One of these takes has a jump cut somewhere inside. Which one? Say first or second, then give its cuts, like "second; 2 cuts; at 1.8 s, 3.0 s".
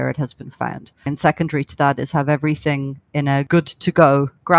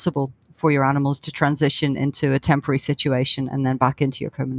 first; 2 cuts; at 1.1 s, 3.5 s